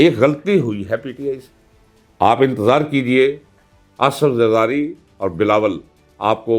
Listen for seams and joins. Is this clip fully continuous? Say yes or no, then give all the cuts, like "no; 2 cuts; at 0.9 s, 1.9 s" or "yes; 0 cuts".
no; 1 cut; at 1.6 s